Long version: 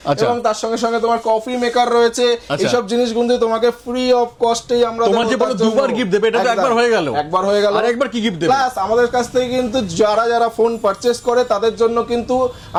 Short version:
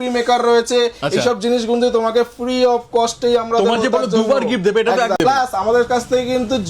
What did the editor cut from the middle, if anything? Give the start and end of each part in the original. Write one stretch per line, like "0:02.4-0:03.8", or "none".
0:06.6-0:08.4